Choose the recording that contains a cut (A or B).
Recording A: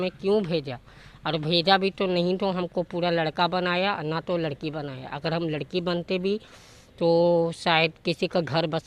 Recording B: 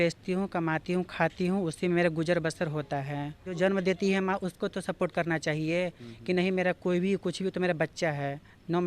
B